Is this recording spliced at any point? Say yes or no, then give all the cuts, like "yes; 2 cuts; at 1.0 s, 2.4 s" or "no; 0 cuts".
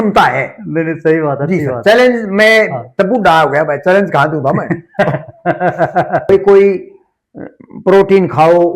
yes; 1 cut; at 6.3 s